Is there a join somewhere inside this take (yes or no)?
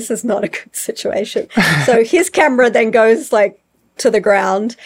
no